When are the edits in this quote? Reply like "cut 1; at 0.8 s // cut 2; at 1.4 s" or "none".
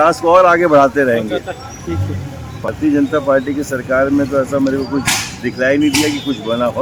none